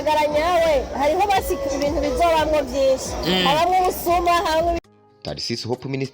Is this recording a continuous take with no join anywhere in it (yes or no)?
no